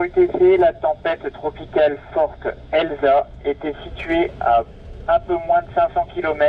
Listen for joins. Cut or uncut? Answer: uncut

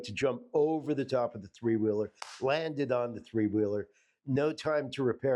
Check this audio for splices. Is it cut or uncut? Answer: uncut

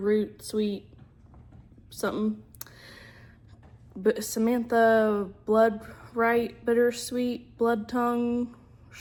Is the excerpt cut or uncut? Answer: uncut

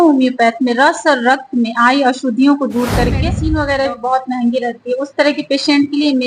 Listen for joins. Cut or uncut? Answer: cut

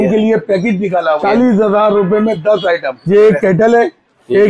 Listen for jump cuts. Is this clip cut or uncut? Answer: cut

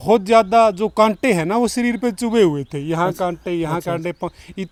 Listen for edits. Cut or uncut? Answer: uncut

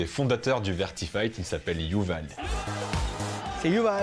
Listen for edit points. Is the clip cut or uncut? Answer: cut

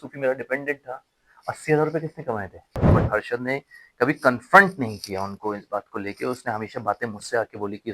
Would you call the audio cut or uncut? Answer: cut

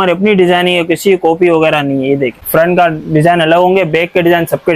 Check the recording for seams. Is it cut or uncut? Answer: cut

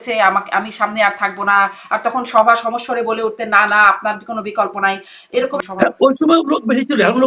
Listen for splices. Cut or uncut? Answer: cut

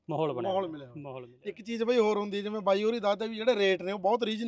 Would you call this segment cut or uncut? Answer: uncut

